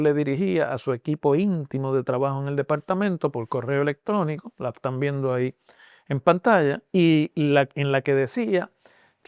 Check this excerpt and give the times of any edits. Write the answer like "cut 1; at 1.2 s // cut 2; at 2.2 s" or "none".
none